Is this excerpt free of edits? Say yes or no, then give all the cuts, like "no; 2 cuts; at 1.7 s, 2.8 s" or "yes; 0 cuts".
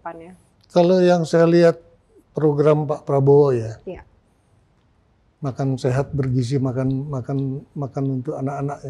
yes; 0 cuts